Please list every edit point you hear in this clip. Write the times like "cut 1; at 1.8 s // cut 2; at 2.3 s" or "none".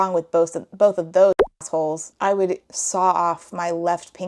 none